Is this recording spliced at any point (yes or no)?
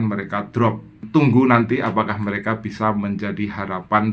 yes